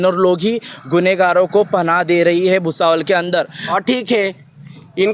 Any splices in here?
yes; 1 cut; at 3.6 s

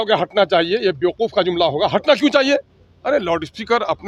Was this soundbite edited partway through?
no; 0 cuts

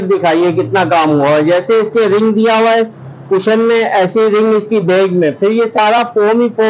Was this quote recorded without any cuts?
yes; 0 cuts

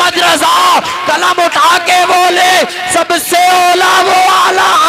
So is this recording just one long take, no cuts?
yes; 0 cuts

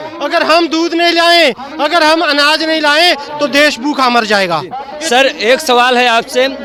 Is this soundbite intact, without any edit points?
yes; 0 cuts

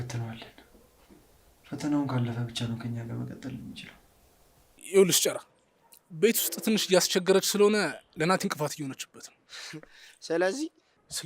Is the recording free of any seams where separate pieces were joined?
no; 1 cut; at 4.8 s

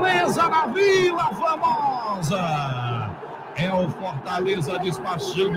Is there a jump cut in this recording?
no; 0 cuts

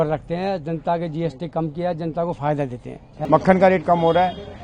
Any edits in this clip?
yes; 1 cut; at 3.1 s

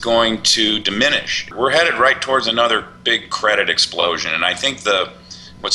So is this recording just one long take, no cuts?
no; 1 cut; at 1.5 s

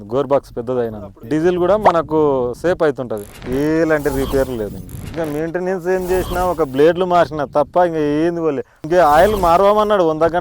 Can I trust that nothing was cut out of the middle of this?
no; 3 cuts; at 3.3 s, 5.0 s, 8.7 s

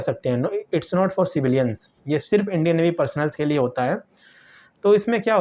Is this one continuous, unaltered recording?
yes; 0 cuts

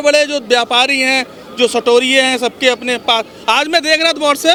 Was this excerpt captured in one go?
yes; 0 cuts

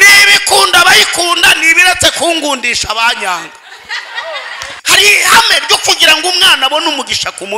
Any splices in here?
yes; 1 cut; at 4.8 s

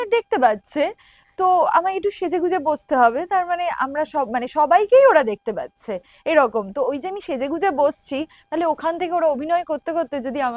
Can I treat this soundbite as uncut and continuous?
yes; 0 cuts

